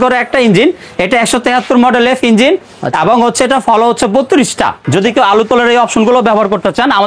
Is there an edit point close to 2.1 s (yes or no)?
no